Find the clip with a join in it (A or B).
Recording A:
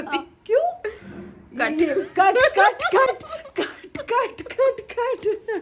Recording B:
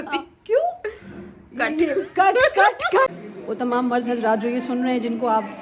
B